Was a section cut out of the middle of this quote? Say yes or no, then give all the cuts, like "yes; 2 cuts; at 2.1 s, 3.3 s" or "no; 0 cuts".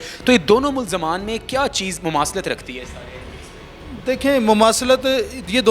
no; 0 cuts